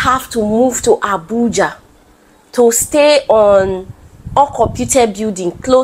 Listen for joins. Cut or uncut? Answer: uncut